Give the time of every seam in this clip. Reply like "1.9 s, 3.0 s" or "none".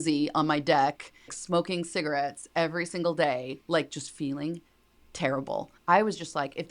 1.3 s, 5.7 s